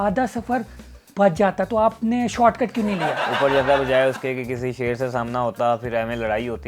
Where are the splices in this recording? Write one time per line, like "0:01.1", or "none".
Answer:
0:03.2